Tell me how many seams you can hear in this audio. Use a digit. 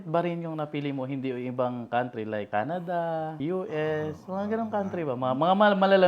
2